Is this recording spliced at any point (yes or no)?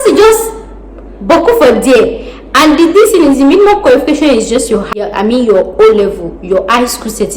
yes